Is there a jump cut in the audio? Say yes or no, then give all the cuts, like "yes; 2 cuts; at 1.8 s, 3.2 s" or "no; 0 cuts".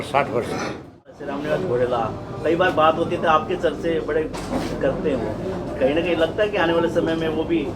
yes; 1 cut; at 1.2 s